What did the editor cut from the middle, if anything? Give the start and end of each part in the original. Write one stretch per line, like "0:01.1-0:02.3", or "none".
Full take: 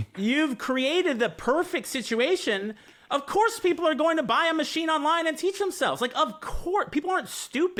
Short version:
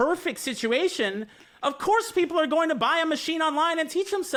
none